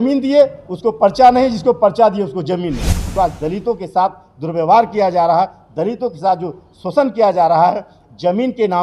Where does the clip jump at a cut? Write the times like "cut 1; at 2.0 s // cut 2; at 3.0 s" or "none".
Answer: cut 1; at 3.0 s